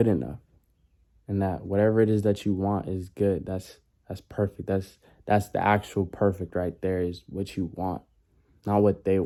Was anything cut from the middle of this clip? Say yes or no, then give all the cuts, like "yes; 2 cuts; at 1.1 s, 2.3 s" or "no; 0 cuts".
no; 0 cuts